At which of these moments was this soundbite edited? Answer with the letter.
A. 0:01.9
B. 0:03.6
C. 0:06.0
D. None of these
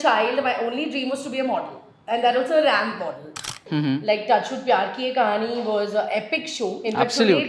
B